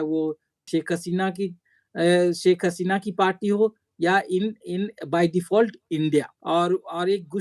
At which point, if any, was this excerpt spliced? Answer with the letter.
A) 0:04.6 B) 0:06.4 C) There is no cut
B